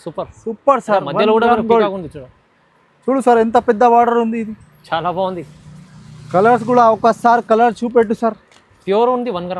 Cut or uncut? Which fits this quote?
uncut